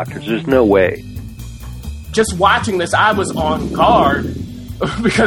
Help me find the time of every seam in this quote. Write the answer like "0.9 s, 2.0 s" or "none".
1.6 s